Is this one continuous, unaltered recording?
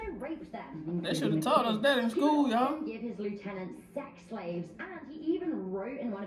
yes; 0 cuts

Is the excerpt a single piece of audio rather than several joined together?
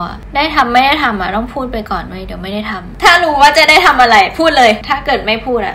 no; 2 cuts; at 2.8 s, 4.9 s

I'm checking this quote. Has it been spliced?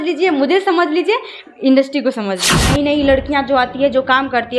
yes; 1 cut; at 2.5 s

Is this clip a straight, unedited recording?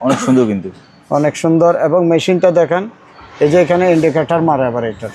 yes; 0 cuts

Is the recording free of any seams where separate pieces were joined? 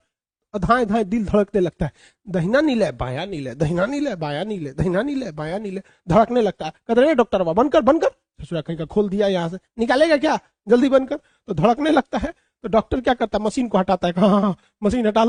yes; 0 cuts

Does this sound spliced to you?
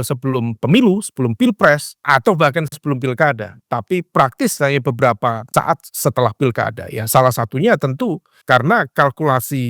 yes; 3 cuts; at 2.0 s, 5.5 s, 8.3 s

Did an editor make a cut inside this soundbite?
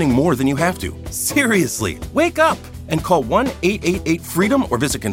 no; 0 cuts

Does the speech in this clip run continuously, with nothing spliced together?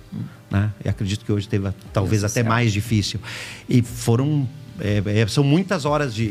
yes; 0 cuts

